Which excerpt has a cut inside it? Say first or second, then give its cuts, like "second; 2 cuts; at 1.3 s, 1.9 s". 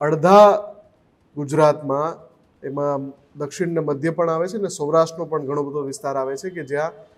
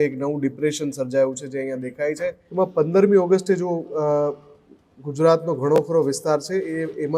second; 1 cut; at 2.4 s